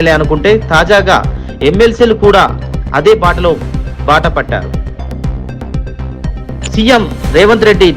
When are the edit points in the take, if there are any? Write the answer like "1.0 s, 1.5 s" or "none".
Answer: 4.6 s, 6.8 s